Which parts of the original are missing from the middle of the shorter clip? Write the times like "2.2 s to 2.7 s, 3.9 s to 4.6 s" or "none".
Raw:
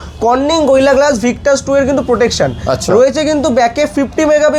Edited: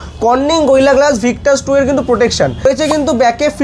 2.6 s to 3.0 s